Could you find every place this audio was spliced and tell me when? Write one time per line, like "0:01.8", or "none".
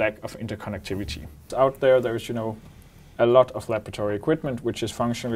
0:01.5